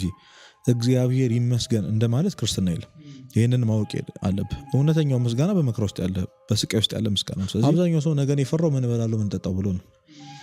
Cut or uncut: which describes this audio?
cut